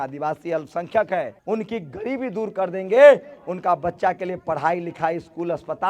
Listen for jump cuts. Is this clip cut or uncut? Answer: cut